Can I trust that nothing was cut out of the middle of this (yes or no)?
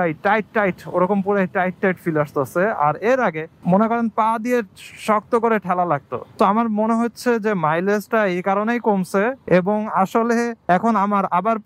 yes